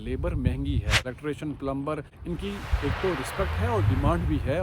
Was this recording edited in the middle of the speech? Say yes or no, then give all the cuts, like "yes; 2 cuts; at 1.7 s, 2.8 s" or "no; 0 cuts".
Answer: yes; 2 cuts; at 1.0 s, 2.1 s